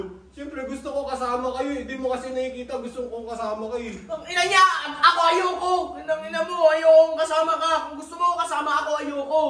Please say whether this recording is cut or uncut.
uncut